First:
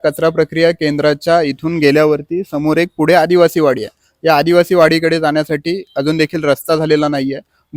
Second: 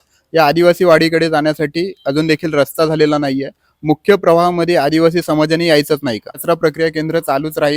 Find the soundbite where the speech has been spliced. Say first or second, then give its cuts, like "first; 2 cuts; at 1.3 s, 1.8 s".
second; 1 cut; at 6.3 s